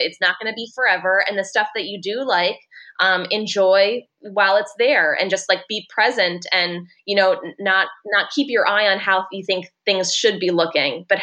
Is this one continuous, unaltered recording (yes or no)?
yes